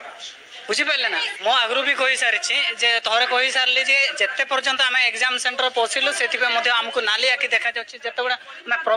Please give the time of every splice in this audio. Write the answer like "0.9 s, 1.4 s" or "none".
1.3 s